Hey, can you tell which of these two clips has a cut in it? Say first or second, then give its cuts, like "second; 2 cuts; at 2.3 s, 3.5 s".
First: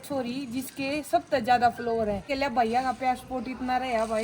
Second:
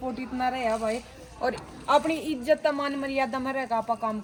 first; 1 cut; at 2.3 s